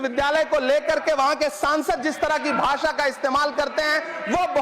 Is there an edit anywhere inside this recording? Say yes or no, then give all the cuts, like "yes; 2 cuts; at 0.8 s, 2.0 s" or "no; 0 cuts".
no; 0 cuts